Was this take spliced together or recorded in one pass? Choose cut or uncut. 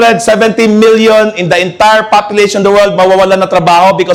uncut